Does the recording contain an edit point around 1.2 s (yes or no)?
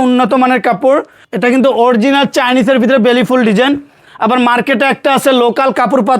yes